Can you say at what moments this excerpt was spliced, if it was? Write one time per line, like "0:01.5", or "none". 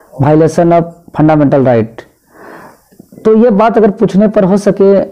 none